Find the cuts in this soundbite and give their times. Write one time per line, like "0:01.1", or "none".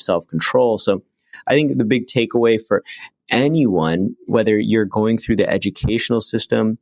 0:04.3

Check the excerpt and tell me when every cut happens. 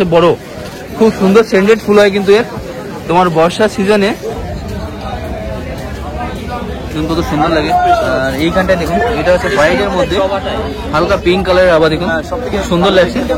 0:04.4

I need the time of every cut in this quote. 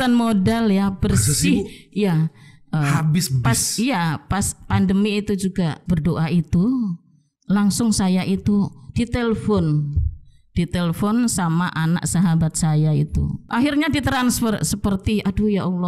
0:05.8
0:13.3

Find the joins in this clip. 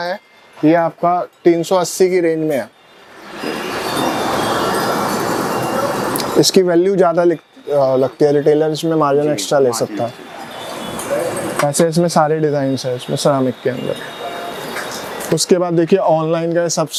none

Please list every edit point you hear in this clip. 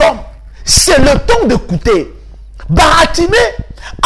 none

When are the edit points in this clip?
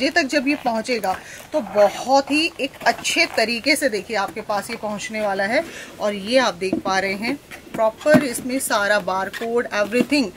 none

